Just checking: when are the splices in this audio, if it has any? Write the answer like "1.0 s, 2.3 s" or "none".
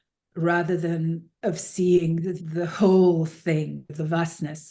1.3 s, 2.4 s, 3.8 s